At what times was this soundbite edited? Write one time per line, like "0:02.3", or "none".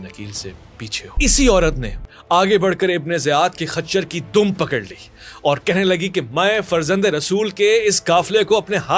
0:01.1